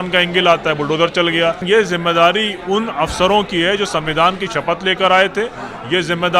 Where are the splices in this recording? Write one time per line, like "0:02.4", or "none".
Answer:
0:01.6